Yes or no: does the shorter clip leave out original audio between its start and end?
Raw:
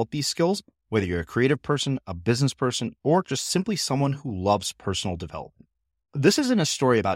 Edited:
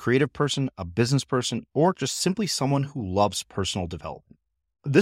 no